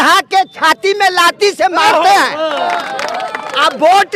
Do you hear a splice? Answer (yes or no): yes